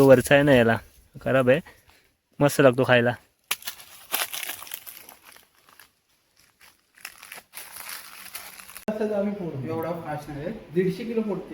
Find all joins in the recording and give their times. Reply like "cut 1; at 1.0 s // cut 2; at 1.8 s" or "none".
cut 1; at 8.9 s